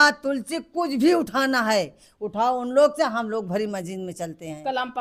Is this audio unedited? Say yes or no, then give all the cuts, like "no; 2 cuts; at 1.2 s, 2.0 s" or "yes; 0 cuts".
yes; 0 cuts